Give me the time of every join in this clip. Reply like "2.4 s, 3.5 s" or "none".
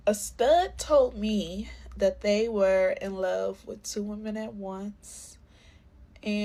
none